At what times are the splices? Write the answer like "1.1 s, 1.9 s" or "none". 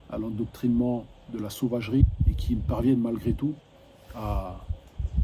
2.0 s